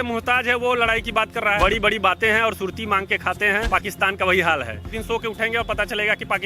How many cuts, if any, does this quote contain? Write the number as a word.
three